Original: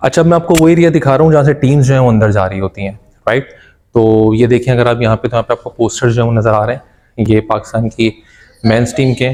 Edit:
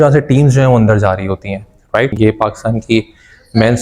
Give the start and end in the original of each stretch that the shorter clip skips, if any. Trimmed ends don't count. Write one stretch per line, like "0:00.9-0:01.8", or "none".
0:03.5-0:07.2